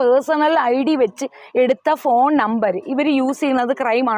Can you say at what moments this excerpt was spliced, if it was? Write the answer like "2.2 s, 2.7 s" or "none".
none

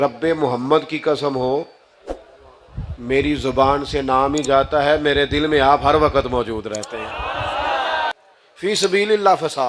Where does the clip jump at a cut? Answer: 8.1 s

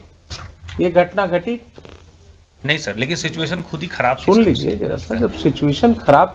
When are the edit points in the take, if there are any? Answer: none

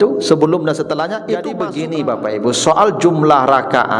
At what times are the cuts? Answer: 1.5 s

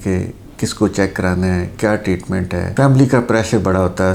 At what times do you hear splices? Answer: none

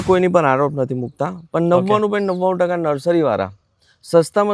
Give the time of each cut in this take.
none

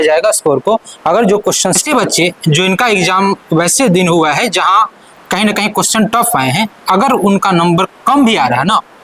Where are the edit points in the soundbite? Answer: 1.8 s

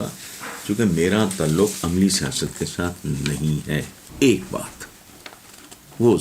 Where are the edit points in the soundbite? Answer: 4.0 s

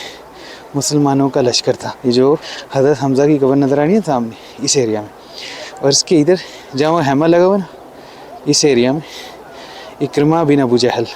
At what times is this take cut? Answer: 1.9 s, 2.6 s

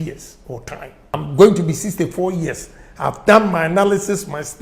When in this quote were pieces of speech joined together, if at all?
1.1 s

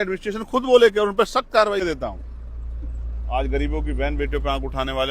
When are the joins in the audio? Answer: 1.8 s

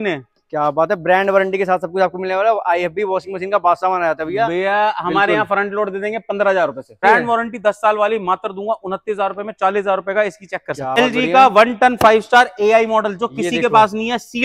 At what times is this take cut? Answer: 7.0 s, 11.0 s

